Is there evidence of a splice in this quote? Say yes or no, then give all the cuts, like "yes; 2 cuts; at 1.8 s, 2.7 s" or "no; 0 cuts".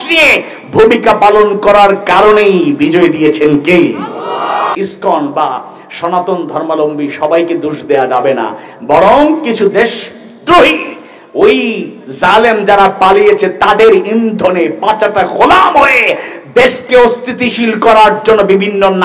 yes; 1 cut; at 4.7 s